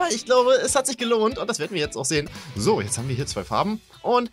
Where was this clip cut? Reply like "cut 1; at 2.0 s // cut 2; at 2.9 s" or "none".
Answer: cut 1; at 2.4 s